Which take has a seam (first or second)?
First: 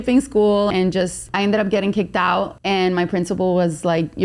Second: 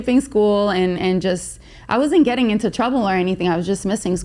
first